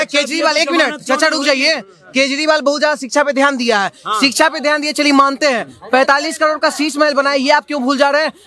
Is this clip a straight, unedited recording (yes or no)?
yes